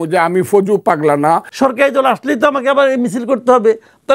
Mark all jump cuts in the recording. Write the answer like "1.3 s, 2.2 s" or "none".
1.5 s